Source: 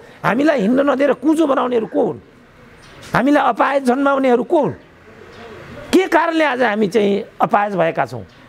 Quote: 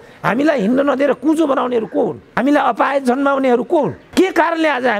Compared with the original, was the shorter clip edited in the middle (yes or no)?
yes